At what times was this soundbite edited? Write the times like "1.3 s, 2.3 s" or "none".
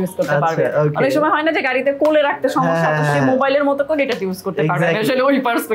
none